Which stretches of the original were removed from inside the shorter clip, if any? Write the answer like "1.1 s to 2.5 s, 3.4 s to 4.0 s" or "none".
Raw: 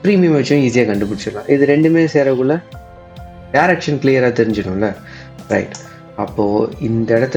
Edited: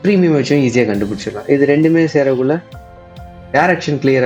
none